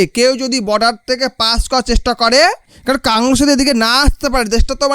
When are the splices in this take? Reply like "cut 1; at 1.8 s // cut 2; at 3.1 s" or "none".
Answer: cut 1; at 2.7 s